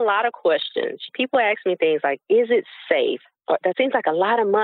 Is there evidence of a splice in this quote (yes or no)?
no